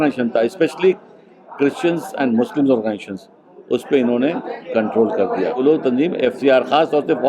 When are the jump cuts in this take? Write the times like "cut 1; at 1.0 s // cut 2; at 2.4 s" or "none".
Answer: cut 1; at 5.6 s